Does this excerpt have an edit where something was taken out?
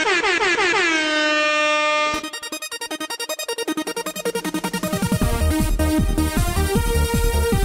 yes; 1 cut; at 4.3 s

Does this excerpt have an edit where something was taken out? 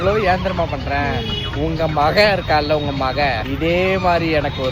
no; 0 cuts

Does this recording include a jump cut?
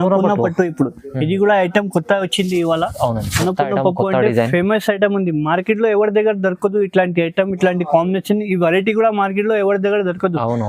no; 0 cuts

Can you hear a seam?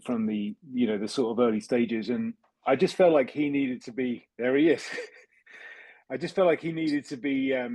no; 0 cuts

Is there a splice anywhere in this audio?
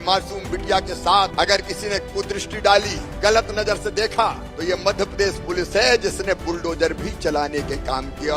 yes; 3 cuts; at 1.3 s, 3.0 s, 4.5 s

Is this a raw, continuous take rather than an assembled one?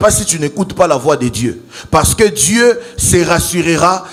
yes; 0 cuts

